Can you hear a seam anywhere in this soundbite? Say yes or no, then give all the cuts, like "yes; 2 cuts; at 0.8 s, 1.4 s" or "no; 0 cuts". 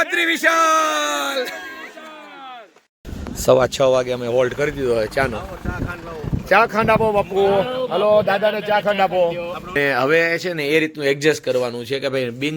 yes; 2 cuts; at 3.0 s, 9.7 s